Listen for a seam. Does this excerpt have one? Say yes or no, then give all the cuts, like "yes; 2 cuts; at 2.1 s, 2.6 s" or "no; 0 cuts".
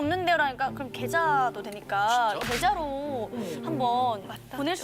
no; 0 cuts